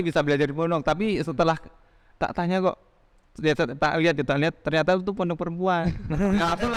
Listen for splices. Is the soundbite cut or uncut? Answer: uncut